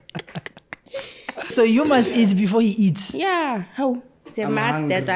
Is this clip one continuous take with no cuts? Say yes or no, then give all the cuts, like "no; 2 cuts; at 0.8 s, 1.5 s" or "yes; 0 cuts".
no; 2 cuts; at 1.5 s, 4.2 s